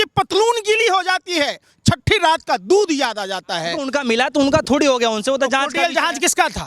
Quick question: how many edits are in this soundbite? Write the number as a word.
one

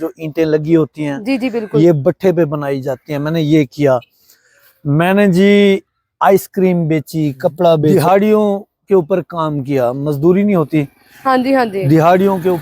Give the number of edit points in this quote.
one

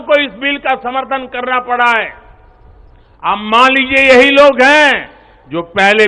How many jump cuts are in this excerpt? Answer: zero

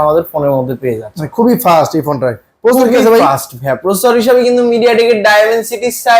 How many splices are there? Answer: zero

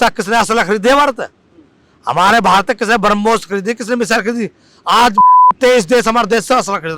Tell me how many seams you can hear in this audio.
zero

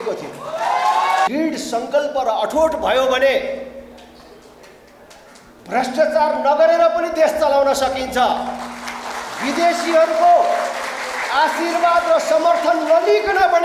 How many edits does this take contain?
one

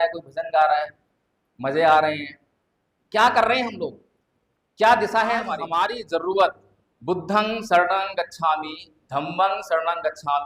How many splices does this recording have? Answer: one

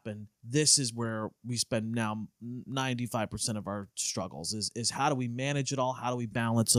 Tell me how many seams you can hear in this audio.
zero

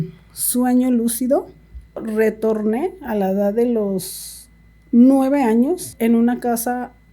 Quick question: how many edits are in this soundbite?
two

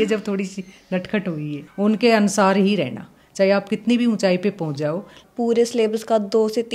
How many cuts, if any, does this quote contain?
two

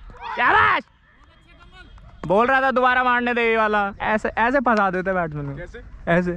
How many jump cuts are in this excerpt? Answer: one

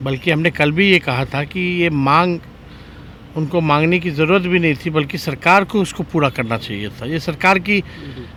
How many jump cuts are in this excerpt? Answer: zero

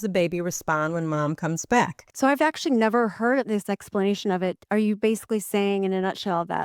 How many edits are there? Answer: three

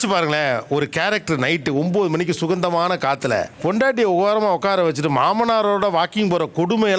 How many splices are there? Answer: zero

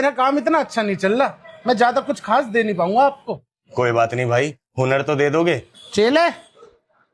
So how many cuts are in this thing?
one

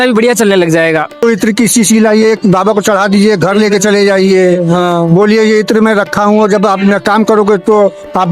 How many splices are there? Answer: one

